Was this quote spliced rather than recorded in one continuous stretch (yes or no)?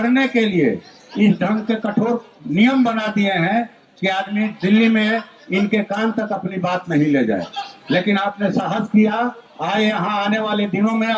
no